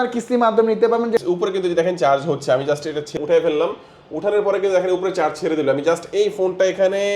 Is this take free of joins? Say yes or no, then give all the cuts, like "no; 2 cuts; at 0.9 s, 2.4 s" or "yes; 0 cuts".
no; 2 cuts; at 1.2 s, 3.1 s